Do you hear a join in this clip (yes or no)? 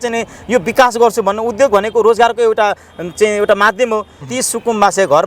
yes